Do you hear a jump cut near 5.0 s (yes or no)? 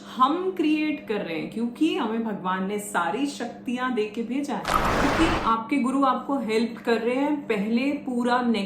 yes